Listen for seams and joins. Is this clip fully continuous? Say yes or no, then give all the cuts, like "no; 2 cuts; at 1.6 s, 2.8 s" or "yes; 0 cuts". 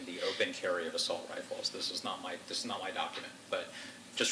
yes; 0 cuts